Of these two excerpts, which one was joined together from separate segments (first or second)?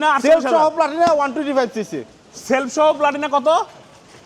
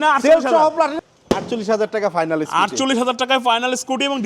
second